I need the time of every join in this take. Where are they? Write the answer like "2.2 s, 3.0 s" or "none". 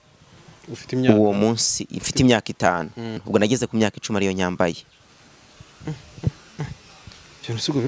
3.2 s